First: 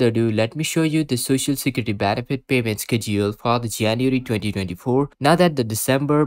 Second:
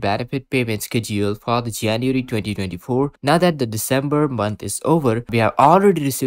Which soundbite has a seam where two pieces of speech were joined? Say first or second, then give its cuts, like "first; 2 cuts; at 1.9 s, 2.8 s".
second; 1 cut; at 5.3 s